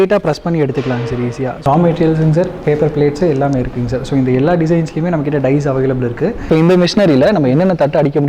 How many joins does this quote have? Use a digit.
2